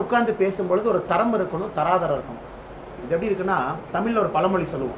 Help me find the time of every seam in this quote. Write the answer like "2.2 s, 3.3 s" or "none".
3.0 s